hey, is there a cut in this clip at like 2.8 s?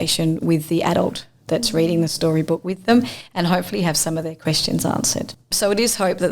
no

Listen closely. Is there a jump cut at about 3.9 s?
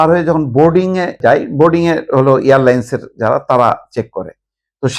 no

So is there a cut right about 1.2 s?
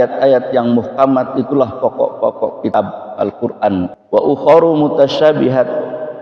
no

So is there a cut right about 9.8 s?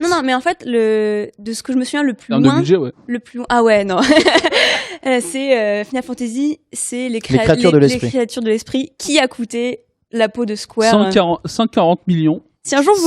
yes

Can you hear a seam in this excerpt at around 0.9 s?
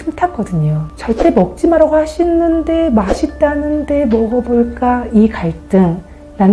yes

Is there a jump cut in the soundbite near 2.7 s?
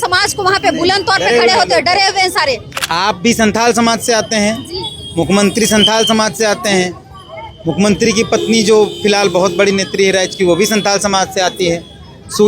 yes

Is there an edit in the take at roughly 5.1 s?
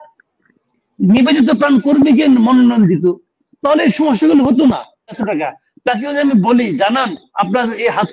yes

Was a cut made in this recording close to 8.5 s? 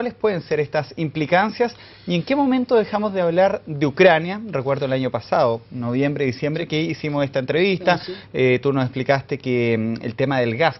yes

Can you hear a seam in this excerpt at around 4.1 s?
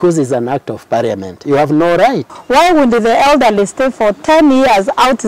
no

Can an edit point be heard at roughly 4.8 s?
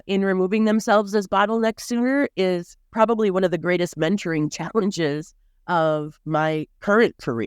no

